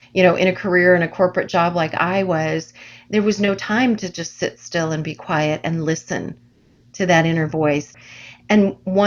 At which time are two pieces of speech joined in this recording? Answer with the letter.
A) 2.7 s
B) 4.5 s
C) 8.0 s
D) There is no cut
C